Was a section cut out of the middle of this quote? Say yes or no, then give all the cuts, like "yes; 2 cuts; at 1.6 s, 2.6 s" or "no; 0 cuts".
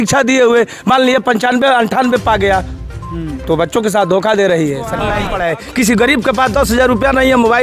yes; 1 cut; at 5.1 s